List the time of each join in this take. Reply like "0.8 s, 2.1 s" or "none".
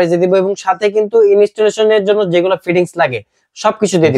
none